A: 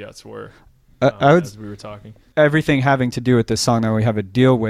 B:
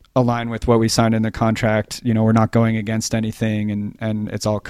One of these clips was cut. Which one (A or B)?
A